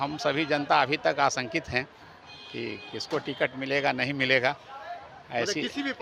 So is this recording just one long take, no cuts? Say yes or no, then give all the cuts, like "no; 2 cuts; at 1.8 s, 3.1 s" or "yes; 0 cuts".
yes; 0 cuts